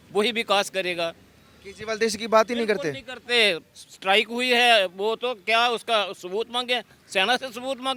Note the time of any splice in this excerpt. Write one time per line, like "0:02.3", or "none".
none